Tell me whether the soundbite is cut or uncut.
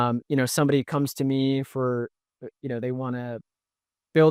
uncut